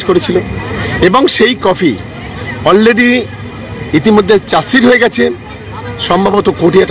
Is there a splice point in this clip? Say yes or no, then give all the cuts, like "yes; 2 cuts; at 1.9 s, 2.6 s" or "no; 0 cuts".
no; 0 cuts